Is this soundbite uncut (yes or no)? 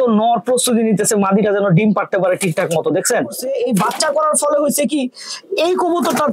no